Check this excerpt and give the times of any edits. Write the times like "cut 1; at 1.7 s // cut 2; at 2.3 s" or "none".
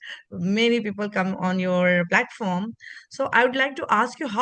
none